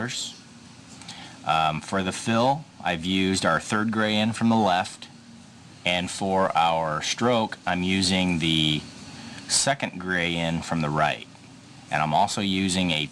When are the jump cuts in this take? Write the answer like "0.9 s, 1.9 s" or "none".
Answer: 1.6 s